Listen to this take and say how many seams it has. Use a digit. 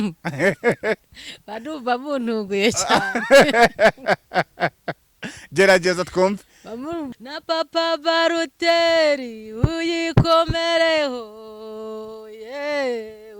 1